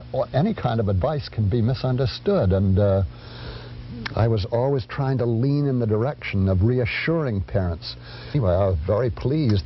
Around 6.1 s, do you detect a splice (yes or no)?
no